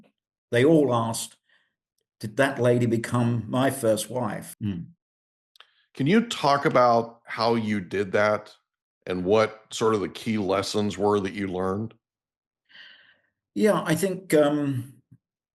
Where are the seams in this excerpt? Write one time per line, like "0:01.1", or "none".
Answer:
0:04.5